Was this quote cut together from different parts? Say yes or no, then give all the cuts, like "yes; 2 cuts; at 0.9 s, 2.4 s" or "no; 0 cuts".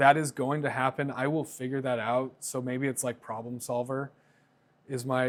no; 0 cuts